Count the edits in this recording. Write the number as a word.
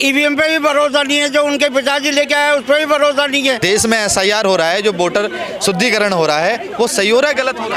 zero